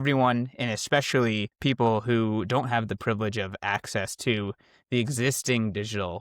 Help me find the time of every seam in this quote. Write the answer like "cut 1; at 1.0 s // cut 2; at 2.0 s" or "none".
cut 1; at 1.5 s

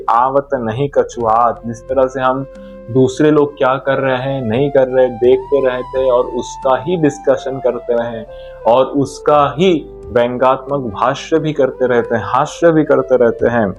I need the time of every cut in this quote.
none

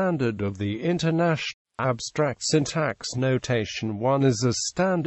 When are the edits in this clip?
none

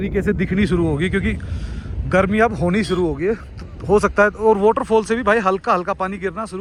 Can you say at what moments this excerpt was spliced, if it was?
none

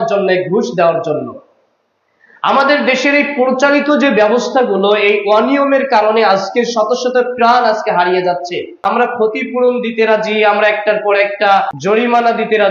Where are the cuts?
cut 1; at 9.2 s // cut 2; at 11.7 s

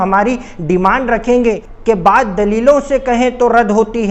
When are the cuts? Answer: cut 1; at 1.7 s

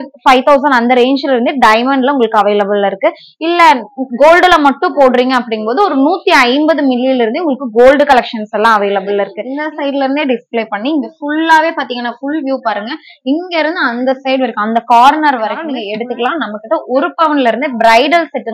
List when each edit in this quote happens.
cut 1; at 9.4 s // cut 2; at 15.6 s

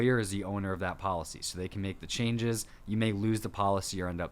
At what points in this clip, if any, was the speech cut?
cut 1; at 2.7 s

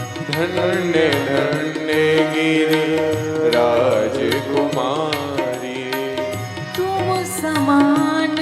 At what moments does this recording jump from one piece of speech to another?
cut 1; at 5.3 s

